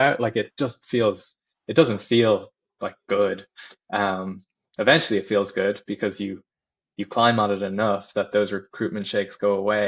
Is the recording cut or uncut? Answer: uncut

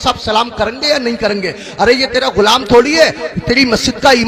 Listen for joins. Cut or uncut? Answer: uncut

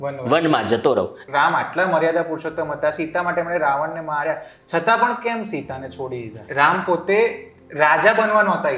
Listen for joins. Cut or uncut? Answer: cut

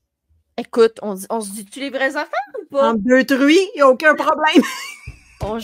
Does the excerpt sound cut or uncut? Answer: uncut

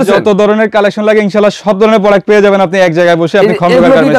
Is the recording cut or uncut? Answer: uncut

